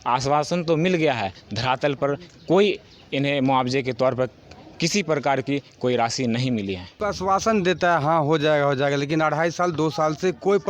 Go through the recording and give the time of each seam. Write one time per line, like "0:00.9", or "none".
0:06.9